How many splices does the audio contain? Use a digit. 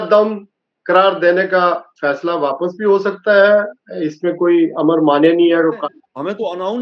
1